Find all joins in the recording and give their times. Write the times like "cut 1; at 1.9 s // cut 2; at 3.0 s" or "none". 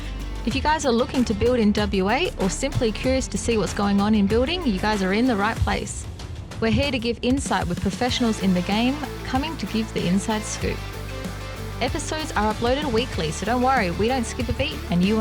none